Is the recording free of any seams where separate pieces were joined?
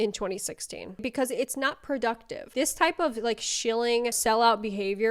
no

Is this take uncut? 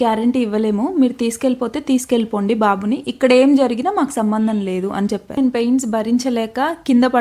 no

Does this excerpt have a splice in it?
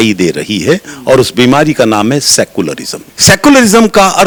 no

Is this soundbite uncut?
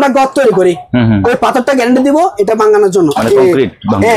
yes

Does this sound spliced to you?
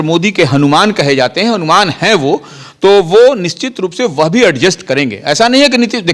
no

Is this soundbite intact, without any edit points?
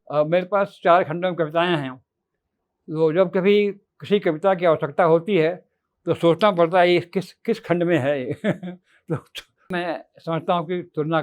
no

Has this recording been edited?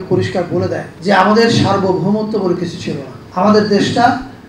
yes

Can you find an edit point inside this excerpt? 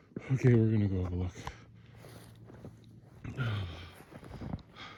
no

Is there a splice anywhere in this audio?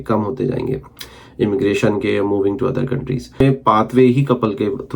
yes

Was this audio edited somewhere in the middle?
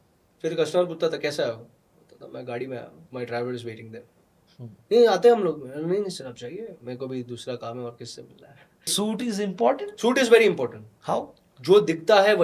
yes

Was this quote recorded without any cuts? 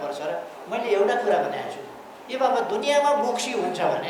yes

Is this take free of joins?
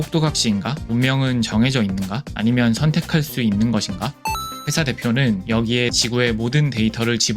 no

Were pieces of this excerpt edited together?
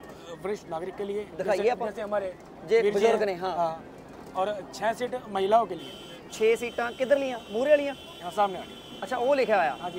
no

